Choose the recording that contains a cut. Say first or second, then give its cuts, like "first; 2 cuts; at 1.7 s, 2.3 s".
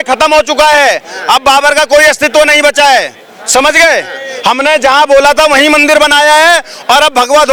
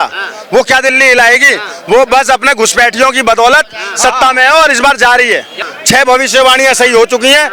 second; 1 cut; at 5.7 s